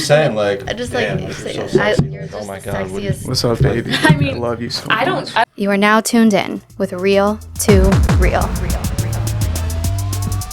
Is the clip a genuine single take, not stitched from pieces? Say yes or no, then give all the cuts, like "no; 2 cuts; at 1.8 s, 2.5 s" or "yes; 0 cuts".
no; 1 cut; at 5.4 s